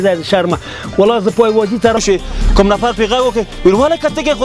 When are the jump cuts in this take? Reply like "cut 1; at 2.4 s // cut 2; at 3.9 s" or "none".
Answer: cut 1; at 2.0 s